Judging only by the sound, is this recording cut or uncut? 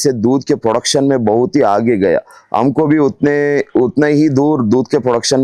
uncut